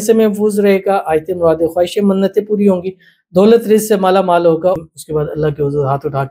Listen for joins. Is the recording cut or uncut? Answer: cut